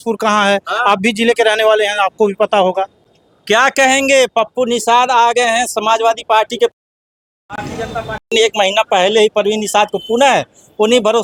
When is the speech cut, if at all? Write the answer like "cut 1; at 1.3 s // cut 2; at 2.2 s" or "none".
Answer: none